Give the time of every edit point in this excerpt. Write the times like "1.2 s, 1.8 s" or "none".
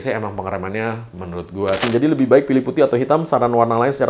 1.9 s

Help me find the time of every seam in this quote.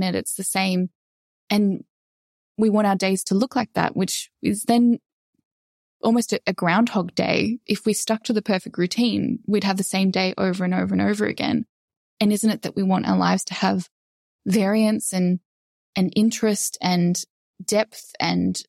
7.6 s

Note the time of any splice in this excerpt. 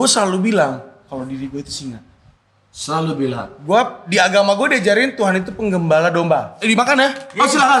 6.5 s

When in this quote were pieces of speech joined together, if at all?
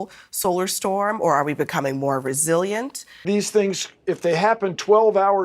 3.1 s

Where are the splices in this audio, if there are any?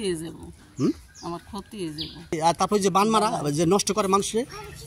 2.4 s

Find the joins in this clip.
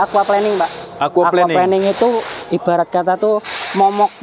none

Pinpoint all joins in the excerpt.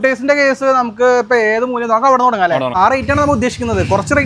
2.8 s

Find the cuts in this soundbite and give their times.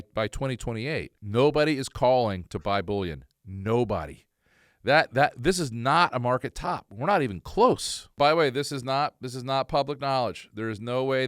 1.2 s, 8.1 s

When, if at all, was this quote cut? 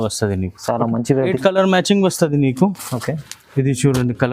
1.4 s

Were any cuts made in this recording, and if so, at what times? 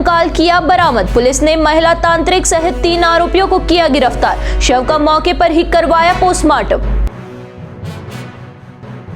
none

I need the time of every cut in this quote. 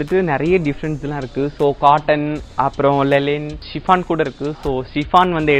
3.7 s

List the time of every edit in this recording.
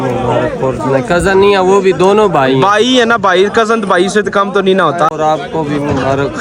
5.1 s

